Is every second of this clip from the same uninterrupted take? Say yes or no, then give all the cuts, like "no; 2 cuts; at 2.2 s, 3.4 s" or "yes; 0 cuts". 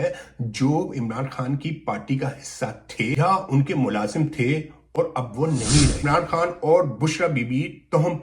no; 2 cuts; at 3.2 s, 6.0 s